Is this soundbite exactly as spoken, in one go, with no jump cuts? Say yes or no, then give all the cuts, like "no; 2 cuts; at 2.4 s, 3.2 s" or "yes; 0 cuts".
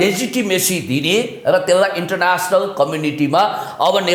yes; 0 cuts